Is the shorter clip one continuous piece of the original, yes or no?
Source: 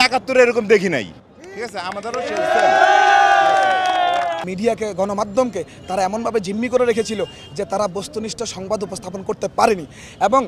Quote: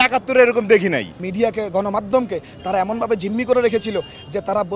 no